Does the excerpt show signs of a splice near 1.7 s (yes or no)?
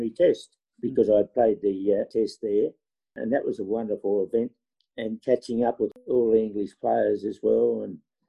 no